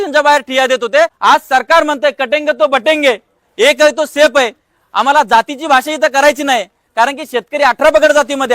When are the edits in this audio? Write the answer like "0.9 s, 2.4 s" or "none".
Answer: 1.1 s